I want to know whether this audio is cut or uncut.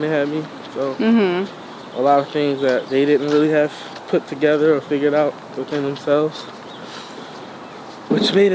uncut